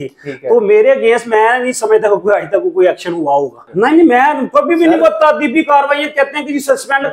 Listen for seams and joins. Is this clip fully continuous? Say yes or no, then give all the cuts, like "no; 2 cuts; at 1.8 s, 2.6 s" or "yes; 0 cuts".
no; 1 cut; at 3.7 s